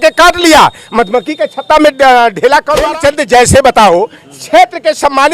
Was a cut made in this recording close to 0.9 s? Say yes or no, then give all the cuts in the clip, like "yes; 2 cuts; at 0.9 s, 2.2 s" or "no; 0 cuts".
no; 1 cut; at 2.9 s